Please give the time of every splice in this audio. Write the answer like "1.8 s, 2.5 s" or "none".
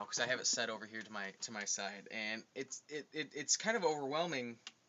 1.8 s

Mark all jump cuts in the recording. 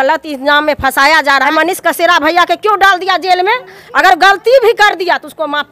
1.4 s

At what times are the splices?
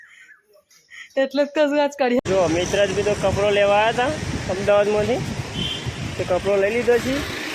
2.2 s

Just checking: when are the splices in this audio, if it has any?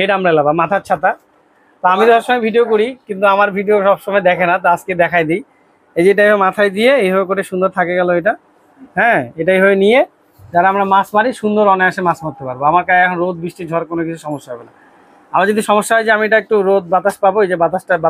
none

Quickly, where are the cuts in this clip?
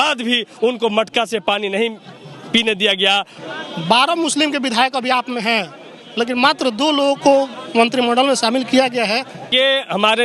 3.4 s, 9.4 s

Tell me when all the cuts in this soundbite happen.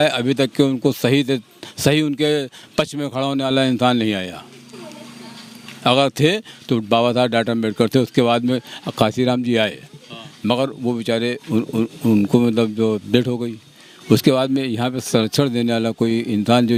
none

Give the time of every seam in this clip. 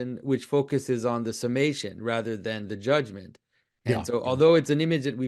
none

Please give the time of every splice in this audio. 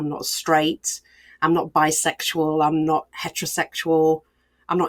none

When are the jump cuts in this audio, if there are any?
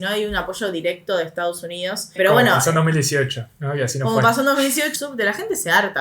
2.2 s, 4.9 s

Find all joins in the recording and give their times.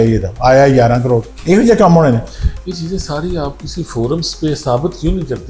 1.3 s

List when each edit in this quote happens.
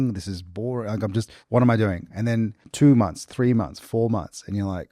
1.4 s, 2.6 s

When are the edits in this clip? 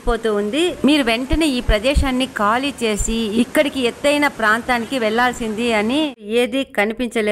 6.2 s

